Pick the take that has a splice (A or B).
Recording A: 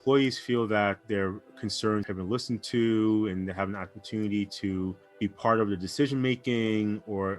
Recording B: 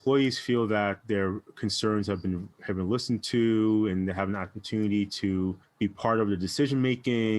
A